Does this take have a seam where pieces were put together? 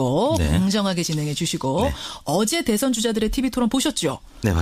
no; 0 cuts

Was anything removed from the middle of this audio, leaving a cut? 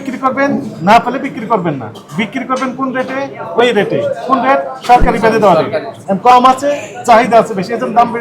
yes; 1 cut; at 6.0 s

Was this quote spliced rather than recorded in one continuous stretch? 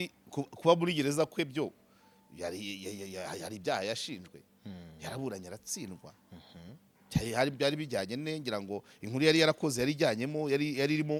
no; 0 cuts

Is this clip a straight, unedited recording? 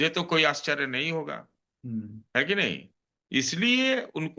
yes; 0 cuts

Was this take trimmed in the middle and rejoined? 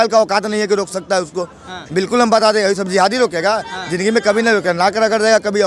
no; 0 cuts

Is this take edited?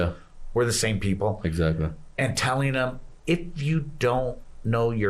no; 0 cuts

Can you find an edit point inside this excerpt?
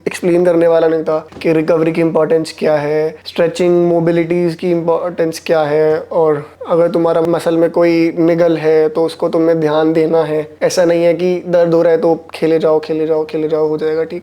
no; 0 cuts

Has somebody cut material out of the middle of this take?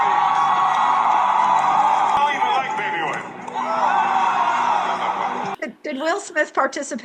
yes; 2 cuts; at 2.2 s, 5.5 s

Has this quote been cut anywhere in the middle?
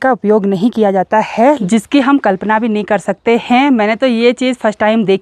yes; 1 cut; at 1.6 s

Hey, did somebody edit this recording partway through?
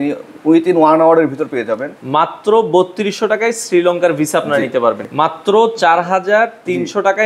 yes; 2 cuts; at 1.9 s, 5.0 s

